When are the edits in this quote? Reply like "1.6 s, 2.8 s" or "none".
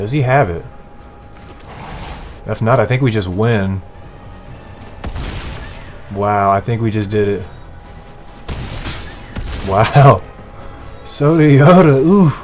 2.4 s, 3.9 s, 7.8 s